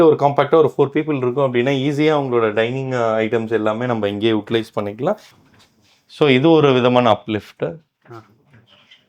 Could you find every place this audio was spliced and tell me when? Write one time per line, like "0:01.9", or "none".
0:05.4